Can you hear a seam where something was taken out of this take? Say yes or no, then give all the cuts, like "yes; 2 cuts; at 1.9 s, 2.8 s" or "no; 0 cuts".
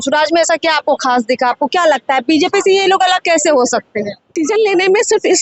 yes; 1 cut; at 4.4 s